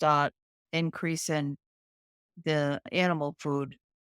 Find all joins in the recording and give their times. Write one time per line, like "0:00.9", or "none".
0:02.9